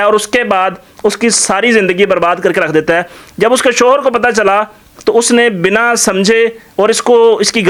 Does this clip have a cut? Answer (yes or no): no